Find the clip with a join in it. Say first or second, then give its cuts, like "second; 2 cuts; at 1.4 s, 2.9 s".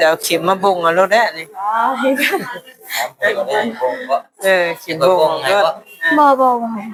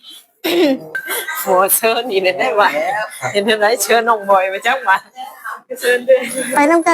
second; 1 cut; at 0.9 s